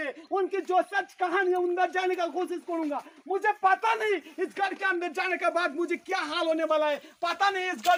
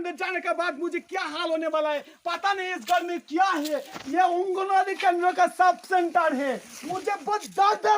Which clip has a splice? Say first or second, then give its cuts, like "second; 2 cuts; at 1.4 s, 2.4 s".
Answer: second; 1 cut; at 4.0 s